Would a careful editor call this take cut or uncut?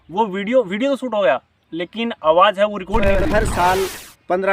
cut